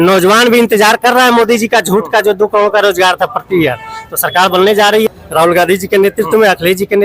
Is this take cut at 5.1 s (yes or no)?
yes